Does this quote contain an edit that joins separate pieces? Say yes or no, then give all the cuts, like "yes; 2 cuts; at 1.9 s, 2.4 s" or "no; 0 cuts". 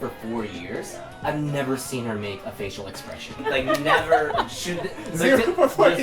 yes; 1 cut; at 3.4 s